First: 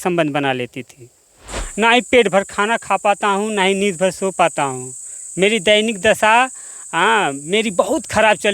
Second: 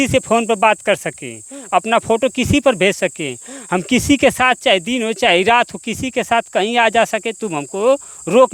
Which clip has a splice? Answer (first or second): first